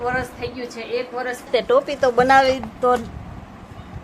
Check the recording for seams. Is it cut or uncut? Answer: cut